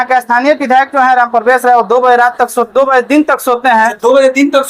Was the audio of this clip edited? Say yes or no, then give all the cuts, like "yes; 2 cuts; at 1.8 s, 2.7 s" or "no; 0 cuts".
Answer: no; 0 cuts